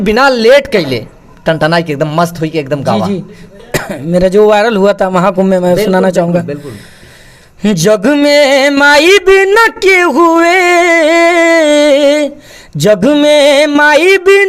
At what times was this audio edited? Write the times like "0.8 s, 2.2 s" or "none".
1.3 s